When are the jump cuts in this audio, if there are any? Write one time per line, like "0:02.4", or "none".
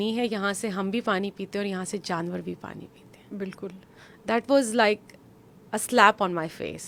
none